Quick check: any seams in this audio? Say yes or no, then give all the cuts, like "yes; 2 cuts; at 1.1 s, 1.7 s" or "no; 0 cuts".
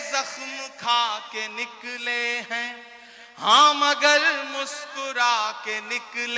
no; 0 cuts